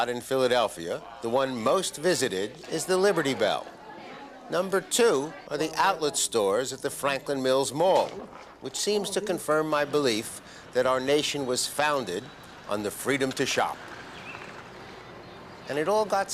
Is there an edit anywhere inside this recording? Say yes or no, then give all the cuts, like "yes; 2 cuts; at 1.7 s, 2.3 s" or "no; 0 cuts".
no; 0 cuts